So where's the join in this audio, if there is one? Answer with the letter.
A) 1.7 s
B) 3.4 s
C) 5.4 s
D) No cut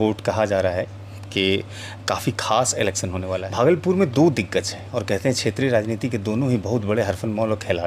B